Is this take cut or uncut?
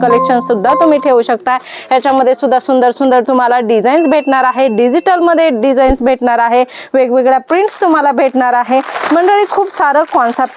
uncut